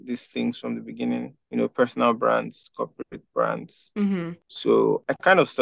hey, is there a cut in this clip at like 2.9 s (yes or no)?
no